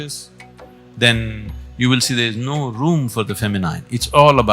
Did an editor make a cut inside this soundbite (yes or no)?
no